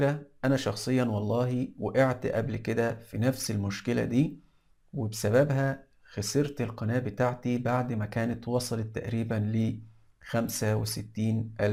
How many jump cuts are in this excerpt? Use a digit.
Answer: 0